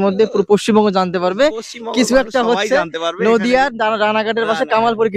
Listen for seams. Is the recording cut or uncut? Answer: uncut